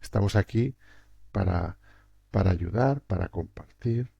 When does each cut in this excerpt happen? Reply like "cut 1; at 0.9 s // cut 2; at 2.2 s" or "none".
cut 1; at 1.2 s